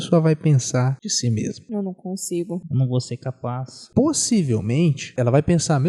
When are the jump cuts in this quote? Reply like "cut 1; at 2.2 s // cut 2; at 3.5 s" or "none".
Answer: cut 1; at 1.4 s // cut 2; at 2.7 s // cut 3; at 3.7 s // cut 4; at 5.1 s